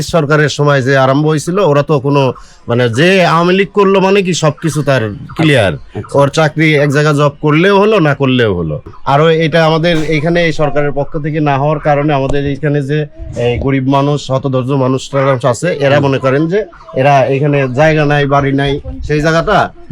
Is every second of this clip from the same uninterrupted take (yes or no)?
no